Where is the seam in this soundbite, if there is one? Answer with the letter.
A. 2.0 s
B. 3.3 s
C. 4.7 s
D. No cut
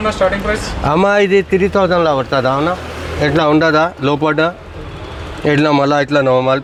D